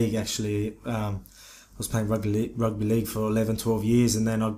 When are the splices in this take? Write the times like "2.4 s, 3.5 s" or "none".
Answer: 2.2 s